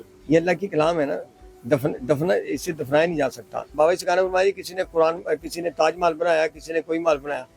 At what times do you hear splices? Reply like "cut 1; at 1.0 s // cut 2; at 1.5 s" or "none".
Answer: cut 1; at 3.7 s